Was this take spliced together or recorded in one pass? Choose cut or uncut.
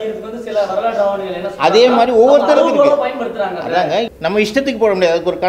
cut